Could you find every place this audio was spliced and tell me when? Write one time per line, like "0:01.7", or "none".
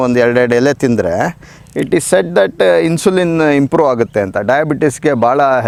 none